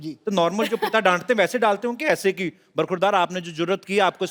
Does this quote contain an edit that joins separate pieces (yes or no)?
no